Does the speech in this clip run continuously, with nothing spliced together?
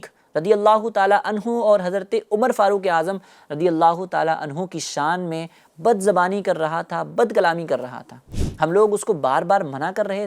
yes; 0 cuts

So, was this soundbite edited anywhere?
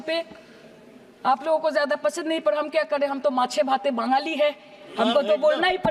no; 0 cuts

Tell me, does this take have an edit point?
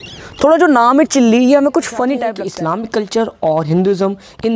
yes; 1 cut; at 2.3 s

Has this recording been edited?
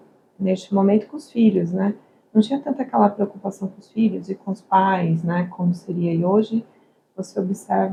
no; 0 cuts

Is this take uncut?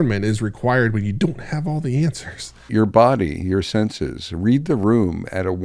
no; 1 cut; at 2.7 s

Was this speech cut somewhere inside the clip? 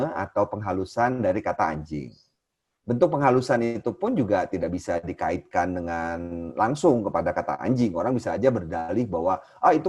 no; 0 cuts

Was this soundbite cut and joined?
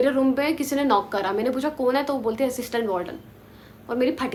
no; 0 cuts

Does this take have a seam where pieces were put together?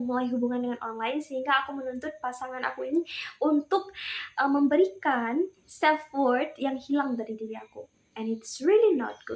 no; 0 cuts

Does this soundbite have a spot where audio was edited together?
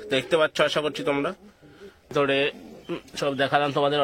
yes; 1 cut; at 2.1 s

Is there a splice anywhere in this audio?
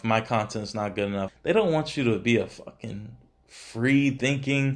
yes; 1 cut; at 1.3 s

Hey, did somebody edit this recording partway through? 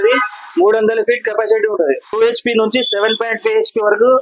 yes; 1 cut; at 2.1 s

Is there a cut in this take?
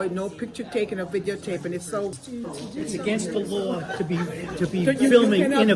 yes; 1 cut; at 2.1 s

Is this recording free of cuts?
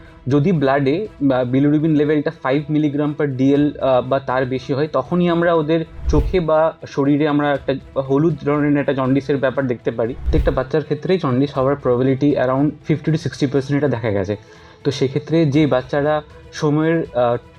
no; 1 cut; at 10.3 s

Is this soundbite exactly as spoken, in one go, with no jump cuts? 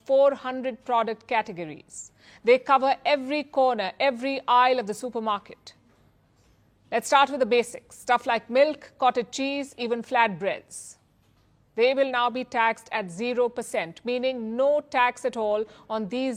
yes; 0 cuts

